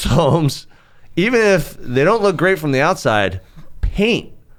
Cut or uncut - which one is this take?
uncut